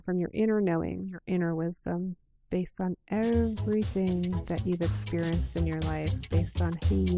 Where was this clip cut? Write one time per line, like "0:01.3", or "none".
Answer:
none